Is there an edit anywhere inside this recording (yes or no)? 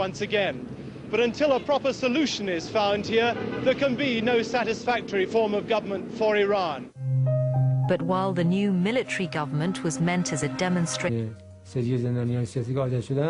no